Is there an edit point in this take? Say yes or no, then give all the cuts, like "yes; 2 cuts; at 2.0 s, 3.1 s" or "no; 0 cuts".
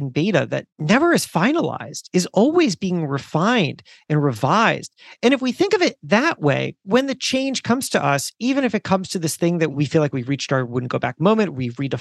yes; 1 cut; at 6.8 s